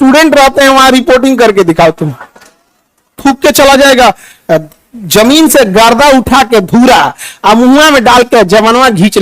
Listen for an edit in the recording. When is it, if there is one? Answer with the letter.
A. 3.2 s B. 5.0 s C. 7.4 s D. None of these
A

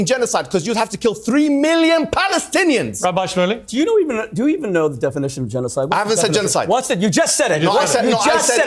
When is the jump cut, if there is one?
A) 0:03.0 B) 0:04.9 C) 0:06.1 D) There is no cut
D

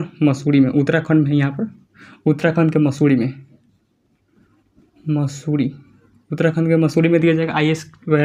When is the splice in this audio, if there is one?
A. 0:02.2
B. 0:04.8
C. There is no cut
C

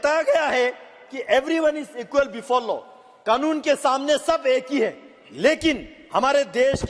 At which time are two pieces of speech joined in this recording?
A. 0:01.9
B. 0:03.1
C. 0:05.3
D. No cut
D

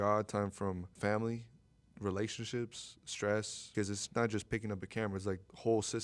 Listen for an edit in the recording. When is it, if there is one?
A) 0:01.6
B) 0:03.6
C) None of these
B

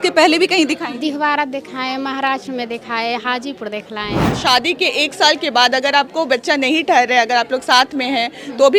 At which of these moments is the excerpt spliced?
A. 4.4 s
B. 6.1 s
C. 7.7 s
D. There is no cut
A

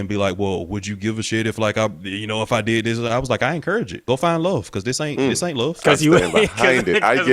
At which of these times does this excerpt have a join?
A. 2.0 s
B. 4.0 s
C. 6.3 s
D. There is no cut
B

